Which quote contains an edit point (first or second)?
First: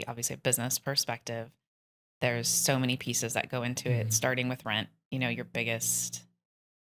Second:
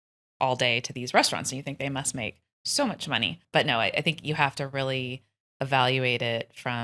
second